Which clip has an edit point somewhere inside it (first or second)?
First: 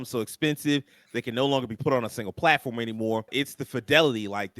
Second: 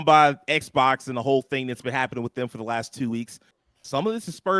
first